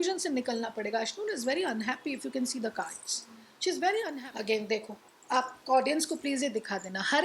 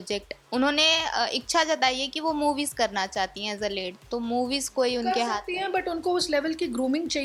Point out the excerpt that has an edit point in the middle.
first; 1 cut; at 4.2 s

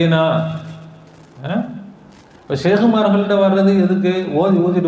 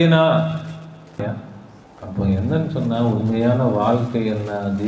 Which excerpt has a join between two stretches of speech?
second; 1 cut; at 1.2 s

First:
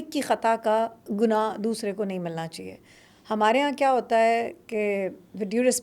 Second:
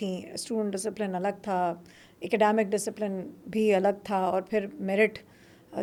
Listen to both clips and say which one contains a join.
first; 1 cut; at 1.0 s

